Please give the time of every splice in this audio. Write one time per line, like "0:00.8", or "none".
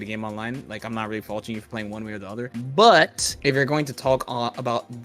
0:02.5
0:03.3

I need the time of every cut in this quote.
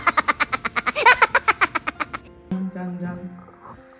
0:02.5

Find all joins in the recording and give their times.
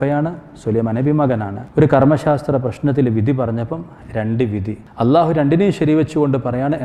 0:01.6
0:04.8

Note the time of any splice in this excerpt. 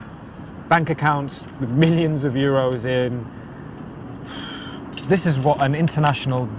none

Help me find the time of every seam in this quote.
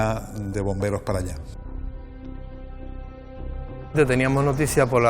none

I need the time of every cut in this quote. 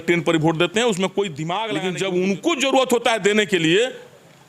0:01.6

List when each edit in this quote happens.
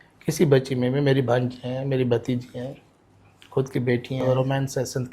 0:04.2

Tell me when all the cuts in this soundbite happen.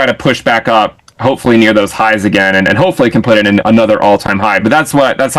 none

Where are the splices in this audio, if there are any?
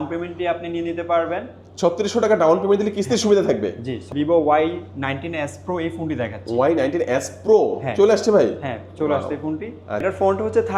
0:04.0
0:10.0

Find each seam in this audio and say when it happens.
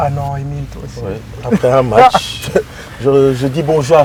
none

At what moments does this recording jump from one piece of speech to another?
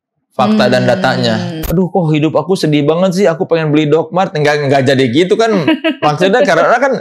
0:01.6

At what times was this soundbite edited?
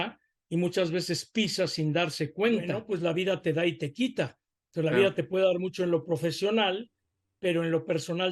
0:02.8

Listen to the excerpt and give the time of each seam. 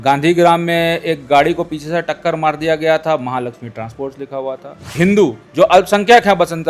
0:04.9

